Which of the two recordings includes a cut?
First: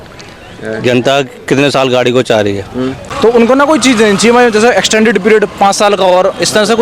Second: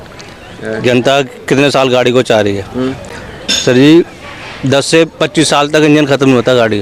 first; 1 cut; at 3.0 s

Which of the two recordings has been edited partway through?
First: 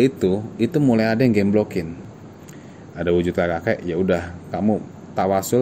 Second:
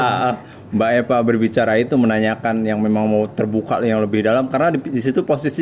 first; 1 cut; at 2.0 s

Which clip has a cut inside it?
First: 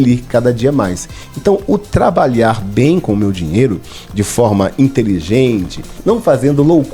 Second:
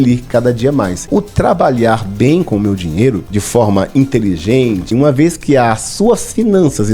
second; 3 cuts; at 1.1 s, 3.3 s, 4.9 s

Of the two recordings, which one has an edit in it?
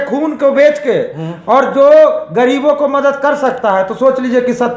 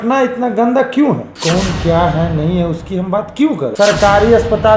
second; 2 cuts; at 1.3 s, 3.7 s

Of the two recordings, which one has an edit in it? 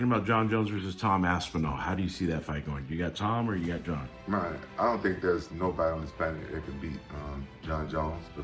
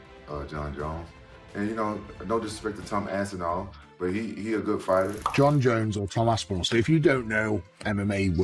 second; 1 cut; at 5.2 s

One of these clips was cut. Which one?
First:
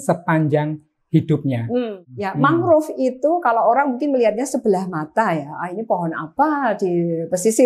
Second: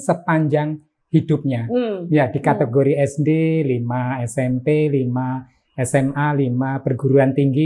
first; 1 cut; at 2.0 s

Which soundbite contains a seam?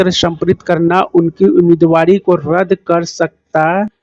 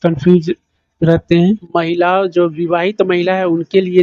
second; 1 cut; at 1.6 s

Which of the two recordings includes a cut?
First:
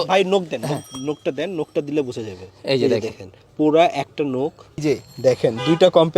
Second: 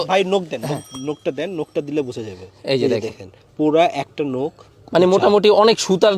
first; 1 cut; at 4.8 s

